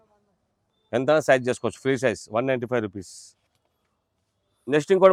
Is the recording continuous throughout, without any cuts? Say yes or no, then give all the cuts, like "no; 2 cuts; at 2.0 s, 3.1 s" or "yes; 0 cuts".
yes; 0 cuts